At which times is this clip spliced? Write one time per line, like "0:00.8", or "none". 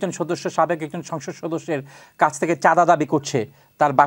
none